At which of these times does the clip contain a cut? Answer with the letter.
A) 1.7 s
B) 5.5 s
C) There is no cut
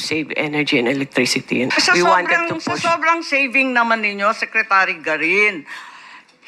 A